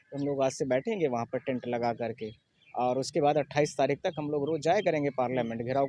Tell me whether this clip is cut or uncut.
uncut